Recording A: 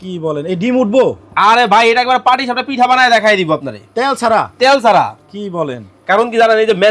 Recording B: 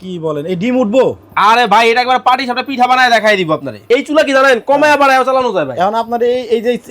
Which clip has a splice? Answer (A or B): B